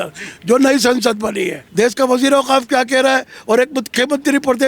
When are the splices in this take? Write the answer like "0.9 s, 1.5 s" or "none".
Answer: 1.6 s

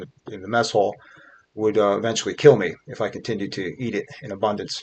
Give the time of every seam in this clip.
none

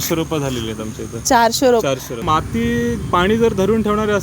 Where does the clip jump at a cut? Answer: 2.1 s

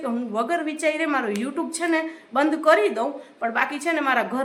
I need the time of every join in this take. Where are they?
none

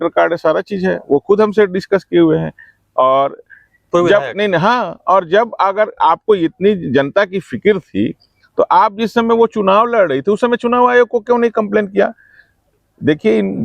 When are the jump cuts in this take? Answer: none

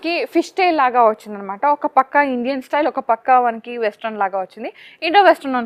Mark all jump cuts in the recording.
none

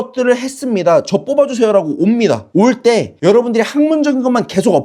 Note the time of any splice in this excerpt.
none

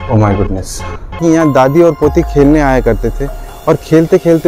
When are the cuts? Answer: 1.2 s

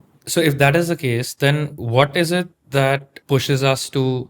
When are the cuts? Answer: 1.8 s, 3.1 s

